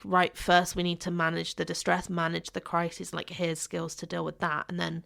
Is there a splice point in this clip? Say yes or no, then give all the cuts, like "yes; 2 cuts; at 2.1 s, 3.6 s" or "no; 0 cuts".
no; 0 cuts